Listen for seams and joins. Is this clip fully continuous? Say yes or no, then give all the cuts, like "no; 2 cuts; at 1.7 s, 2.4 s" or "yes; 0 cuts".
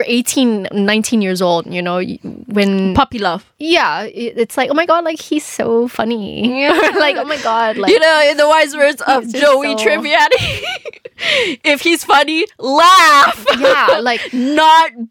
yes; 0 cuts